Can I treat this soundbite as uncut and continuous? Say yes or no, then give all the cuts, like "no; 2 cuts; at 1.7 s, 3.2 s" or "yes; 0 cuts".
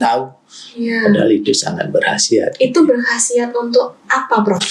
yes; 0 cuts